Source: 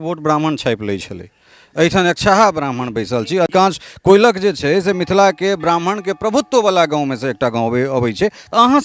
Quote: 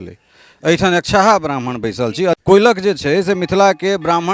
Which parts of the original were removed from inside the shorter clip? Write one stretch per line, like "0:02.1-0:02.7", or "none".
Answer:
0:03.5-0:04.0